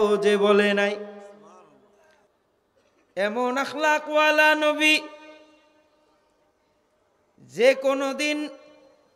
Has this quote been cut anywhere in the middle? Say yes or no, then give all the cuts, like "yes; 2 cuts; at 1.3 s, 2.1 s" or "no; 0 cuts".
yes; 1 cut; at 2.3 s